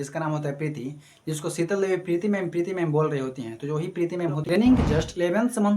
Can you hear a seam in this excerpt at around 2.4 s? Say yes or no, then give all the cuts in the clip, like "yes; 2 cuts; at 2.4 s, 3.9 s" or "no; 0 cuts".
no; 1 cut; at 4.5 s